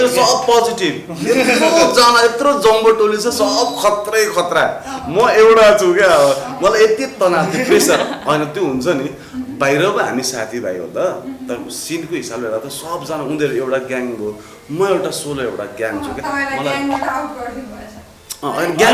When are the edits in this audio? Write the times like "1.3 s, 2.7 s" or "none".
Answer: none